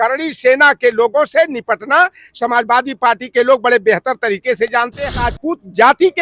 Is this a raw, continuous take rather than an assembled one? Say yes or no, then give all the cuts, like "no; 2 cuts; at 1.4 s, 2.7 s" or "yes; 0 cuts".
no; 1 cut; at 5.1 s